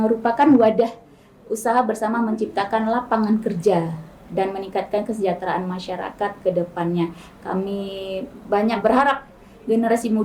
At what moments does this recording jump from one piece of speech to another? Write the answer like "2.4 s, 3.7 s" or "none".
8.8 s